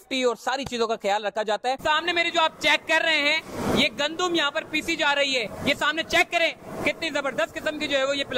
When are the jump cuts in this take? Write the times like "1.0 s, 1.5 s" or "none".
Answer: 1.8 s